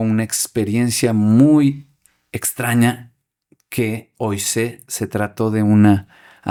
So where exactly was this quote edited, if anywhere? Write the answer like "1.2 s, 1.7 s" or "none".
none